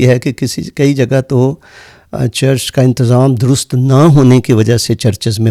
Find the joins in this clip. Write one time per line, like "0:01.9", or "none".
none